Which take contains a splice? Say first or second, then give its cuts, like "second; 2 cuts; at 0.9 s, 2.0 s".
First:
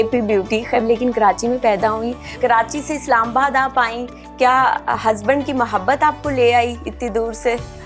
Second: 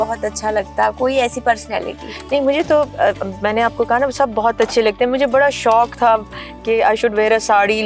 first; 2 cuts; at 0.8 s, 2.4 s